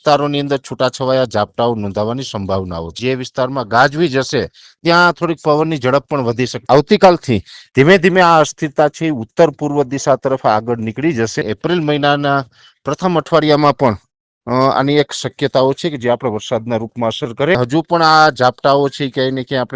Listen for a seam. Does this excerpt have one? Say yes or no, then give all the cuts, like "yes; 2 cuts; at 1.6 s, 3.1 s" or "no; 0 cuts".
yes; 4 cuts; at 2.9 s, 6.6 s, 11.4 s, 17.5 s